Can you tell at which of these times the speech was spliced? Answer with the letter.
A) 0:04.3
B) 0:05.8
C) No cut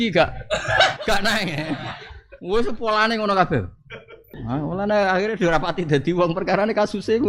A